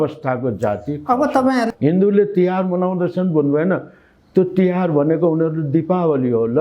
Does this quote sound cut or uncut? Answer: cut